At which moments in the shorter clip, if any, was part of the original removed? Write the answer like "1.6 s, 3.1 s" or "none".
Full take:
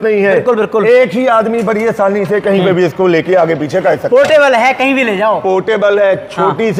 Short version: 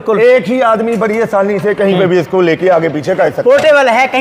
none